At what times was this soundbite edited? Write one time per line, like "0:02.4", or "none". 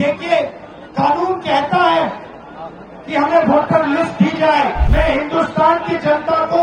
0:04.8